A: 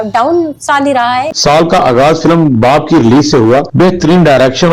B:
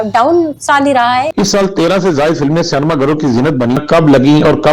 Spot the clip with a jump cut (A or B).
B